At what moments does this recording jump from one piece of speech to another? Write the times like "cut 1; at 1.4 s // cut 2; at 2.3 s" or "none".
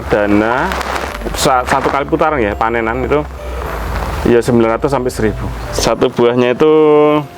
cut 1; at 5.7 s